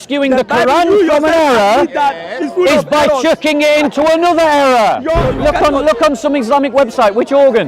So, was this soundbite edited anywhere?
yes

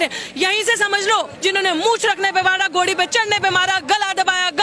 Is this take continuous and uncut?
no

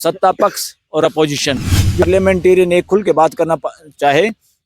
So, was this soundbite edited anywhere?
yes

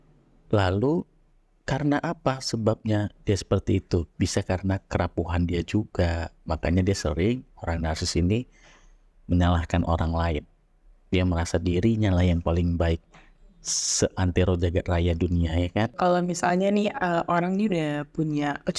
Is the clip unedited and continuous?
no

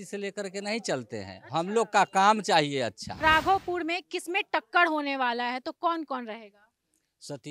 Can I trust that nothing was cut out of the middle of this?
no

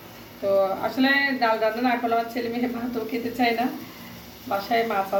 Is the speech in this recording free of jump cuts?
yes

